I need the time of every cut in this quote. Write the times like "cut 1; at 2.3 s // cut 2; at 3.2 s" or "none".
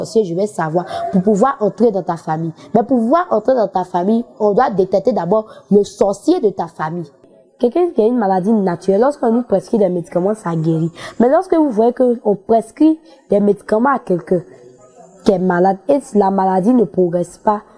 cut 1; at 7.3 s